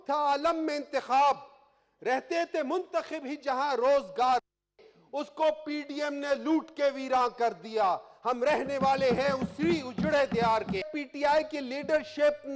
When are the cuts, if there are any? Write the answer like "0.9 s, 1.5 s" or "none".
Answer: 10.9 s